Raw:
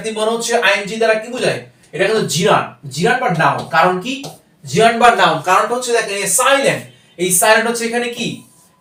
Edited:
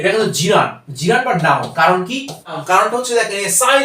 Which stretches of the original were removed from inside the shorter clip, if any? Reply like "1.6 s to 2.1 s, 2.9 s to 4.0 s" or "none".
4.6 s to 5.4 s